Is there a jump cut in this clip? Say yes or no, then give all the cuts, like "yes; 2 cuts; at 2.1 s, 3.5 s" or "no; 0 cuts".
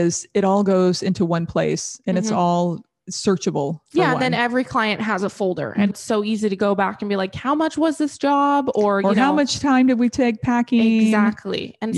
yes; 1 cut; at 5.9 s